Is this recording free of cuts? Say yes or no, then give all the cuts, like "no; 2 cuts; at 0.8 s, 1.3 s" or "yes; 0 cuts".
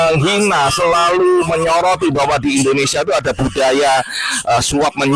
yes; 0 cuts